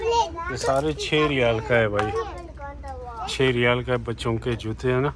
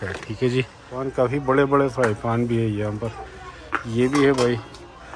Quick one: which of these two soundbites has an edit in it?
second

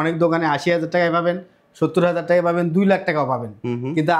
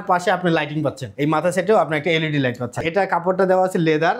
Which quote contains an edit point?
second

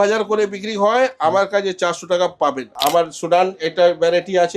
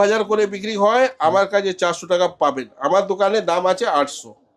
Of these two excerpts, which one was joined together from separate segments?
first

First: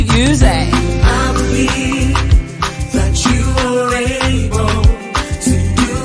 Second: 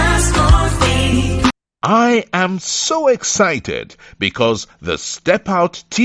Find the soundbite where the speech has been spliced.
second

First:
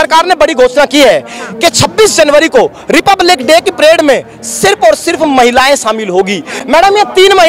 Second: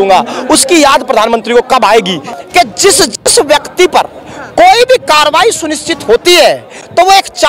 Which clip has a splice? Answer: second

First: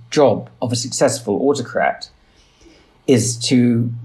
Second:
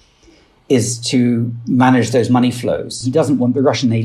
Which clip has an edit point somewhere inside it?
second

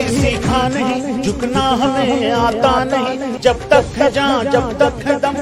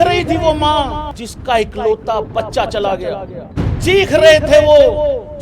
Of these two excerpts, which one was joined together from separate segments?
second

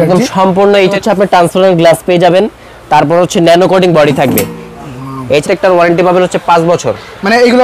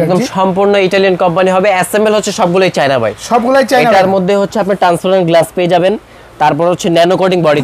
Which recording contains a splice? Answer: first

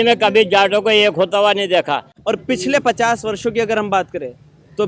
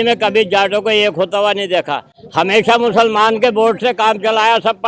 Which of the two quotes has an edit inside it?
first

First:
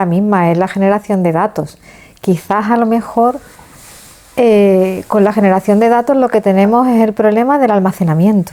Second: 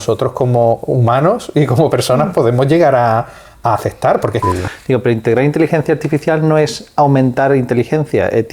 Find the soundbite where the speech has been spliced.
second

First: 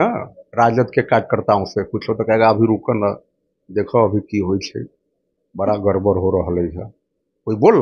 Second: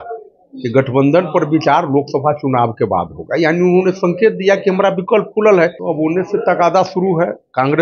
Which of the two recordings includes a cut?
second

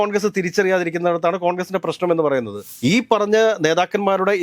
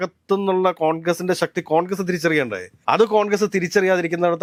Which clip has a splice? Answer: first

